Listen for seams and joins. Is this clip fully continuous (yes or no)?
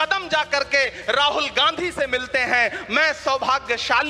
yes